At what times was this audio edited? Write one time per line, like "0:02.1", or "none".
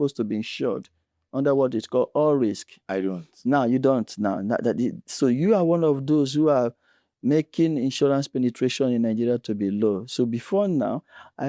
none